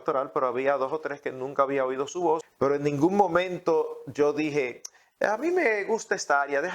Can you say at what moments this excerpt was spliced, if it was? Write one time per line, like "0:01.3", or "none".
0:02.5